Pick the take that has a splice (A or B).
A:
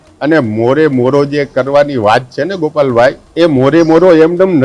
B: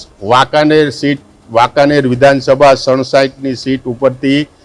A